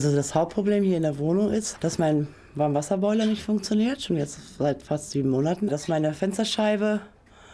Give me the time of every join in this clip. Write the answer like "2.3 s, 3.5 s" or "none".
1.7 s, 5.7 s